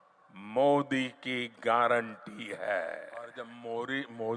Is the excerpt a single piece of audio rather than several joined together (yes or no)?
no